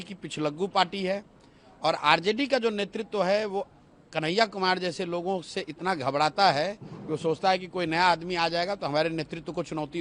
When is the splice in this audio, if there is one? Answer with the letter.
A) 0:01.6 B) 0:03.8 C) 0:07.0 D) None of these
D